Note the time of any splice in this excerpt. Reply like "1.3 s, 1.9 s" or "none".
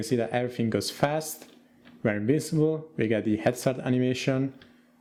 none